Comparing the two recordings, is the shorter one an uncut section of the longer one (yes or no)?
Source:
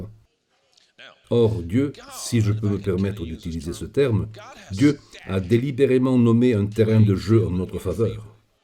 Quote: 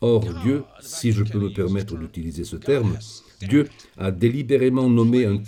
yes